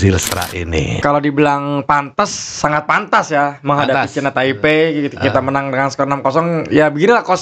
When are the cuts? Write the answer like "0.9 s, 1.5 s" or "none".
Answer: 0.9 s